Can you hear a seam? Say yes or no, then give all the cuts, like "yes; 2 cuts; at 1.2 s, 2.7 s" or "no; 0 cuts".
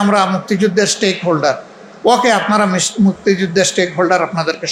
no; 0 cuts